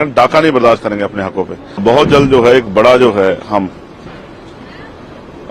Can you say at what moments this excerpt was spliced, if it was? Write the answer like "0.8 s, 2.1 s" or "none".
1.8 s